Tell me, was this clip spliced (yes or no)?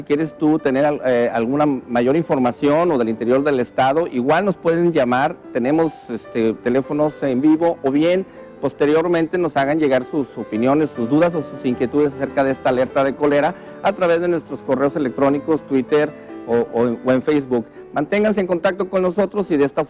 yes